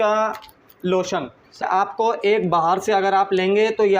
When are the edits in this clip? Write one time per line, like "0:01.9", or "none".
0:01.6